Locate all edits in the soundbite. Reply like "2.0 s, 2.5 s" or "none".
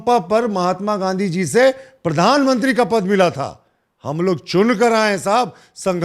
none